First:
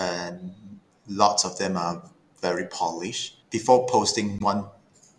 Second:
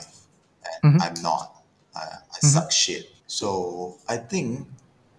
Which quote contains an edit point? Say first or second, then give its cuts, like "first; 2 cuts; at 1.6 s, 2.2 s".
first; 1 cut; at 3.2 s